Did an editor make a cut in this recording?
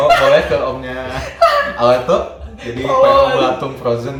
no; 0 cuts

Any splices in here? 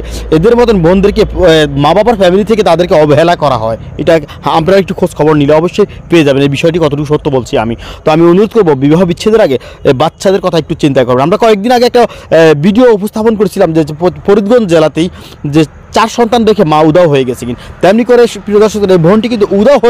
no; 0 cuts

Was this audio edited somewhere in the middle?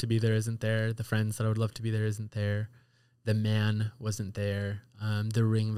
no; 0 cuts

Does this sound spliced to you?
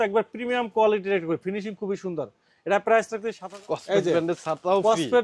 yes; 1 cut; at 3.4 s

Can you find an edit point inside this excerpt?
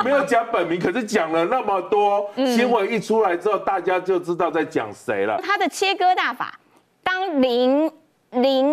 yes; 1 cut; at 5.4 s

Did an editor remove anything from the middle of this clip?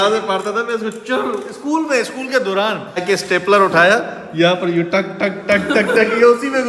yes; 1 cut; at 3.0 s

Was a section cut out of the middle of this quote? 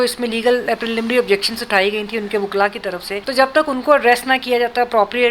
yes; 1 cut; at 3.2 s

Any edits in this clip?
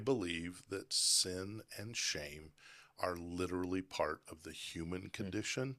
no; 0 cuts

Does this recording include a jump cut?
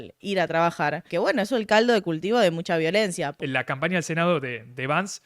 yes; 2 cuts; at 1.1 s, 3.3 s

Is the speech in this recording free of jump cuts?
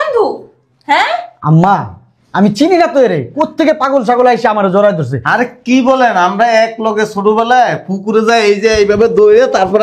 yes; 0 cuts

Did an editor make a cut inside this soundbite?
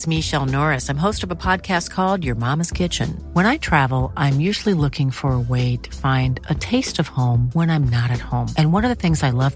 no; 0 cuts

